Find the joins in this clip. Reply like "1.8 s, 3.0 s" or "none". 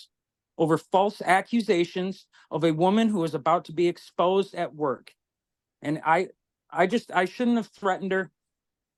none